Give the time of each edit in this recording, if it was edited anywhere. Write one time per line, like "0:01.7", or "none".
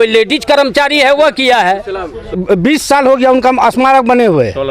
0:02.3